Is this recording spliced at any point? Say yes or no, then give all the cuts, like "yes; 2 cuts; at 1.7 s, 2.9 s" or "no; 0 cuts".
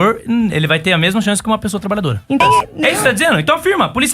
yes; 1 cut; at 2.4 s